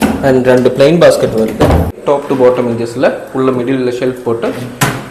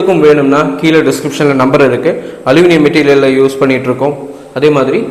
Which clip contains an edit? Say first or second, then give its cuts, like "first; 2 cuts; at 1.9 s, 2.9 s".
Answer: first; 1 cut; at 2.0 s